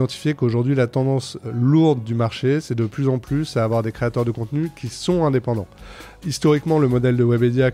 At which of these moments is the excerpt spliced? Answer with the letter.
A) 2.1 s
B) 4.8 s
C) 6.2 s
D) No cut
D